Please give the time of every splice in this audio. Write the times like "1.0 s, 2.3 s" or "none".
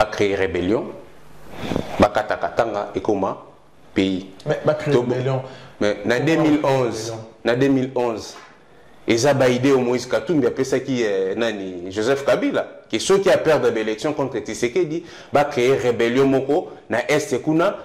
none